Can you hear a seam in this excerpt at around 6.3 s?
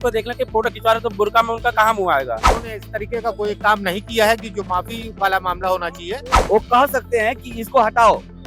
yes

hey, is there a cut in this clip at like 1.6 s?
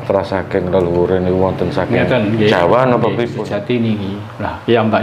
no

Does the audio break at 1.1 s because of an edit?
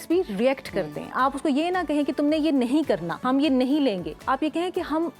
yes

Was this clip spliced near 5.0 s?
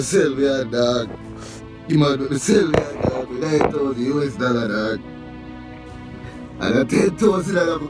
no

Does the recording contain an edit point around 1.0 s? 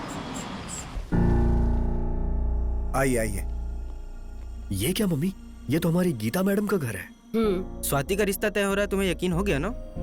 yes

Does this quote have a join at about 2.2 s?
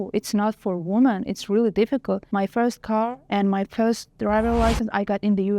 yes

